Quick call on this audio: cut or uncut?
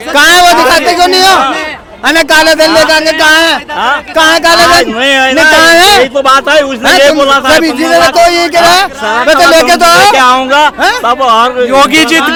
uncut